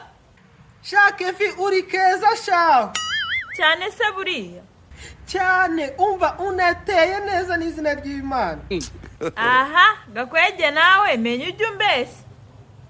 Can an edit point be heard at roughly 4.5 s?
no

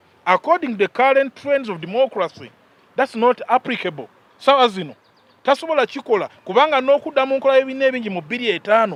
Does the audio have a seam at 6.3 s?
no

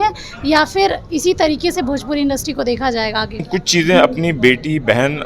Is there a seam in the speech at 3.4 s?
yes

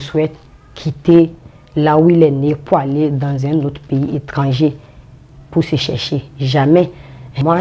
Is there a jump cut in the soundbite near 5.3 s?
no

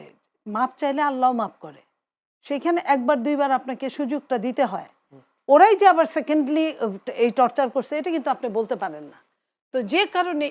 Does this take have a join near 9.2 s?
no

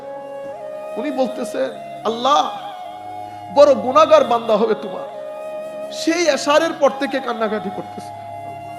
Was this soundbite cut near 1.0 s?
yes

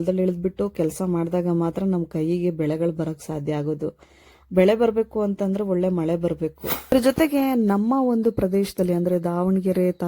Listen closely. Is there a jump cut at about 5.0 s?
no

